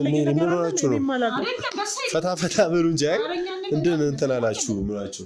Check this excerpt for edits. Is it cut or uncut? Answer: uncut